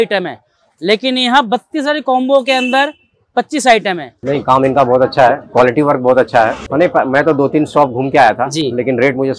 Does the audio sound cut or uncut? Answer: cut